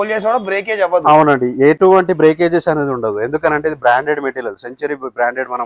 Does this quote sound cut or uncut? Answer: uncut